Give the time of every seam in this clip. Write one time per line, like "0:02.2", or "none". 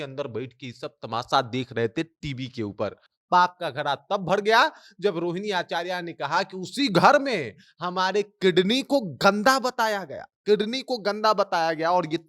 0:03.1